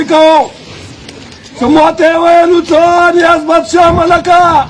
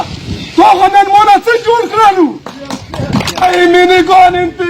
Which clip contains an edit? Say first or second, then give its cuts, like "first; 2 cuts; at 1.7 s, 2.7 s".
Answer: second; 1 cut; at 3.4 s